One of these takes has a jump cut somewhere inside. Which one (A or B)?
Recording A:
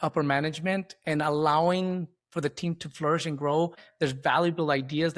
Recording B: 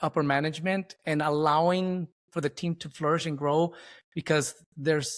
A